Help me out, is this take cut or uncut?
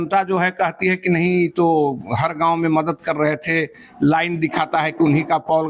uncut